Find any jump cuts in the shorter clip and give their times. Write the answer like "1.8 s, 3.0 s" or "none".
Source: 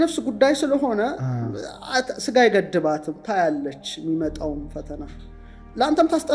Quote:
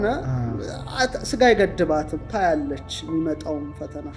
none